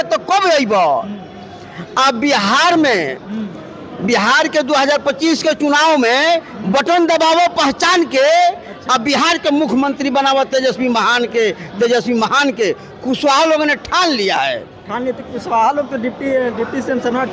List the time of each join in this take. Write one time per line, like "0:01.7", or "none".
none